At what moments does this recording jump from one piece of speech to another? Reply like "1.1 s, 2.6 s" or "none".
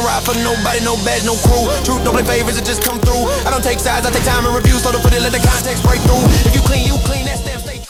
none

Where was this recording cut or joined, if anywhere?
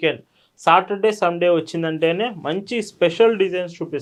none

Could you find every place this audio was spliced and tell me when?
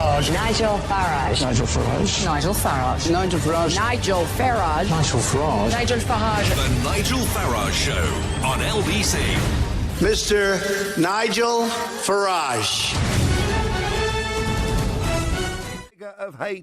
2.2 s

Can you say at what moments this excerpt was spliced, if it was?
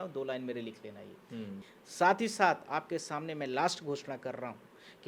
1.6 s

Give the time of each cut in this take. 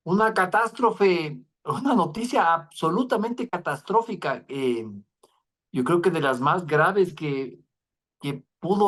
none

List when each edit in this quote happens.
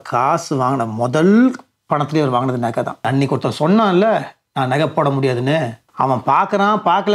3.0 s, 5.8 s

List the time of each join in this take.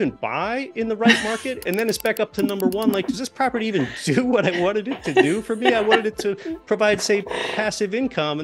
none

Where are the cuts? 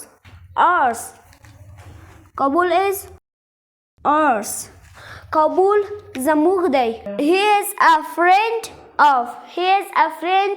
none

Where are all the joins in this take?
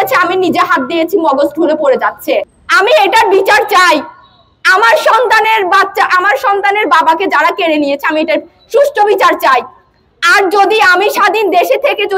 2.6 s

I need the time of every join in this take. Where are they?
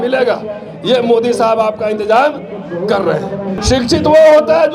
3.6 s

